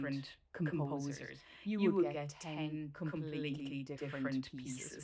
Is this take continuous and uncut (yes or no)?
yes